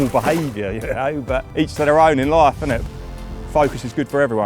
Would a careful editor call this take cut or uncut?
cut